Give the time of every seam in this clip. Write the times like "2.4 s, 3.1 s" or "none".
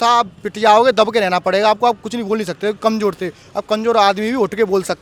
none